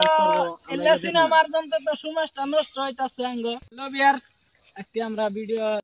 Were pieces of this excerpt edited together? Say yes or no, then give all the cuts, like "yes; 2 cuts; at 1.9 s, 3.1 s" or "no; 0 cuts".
no; 0 cuts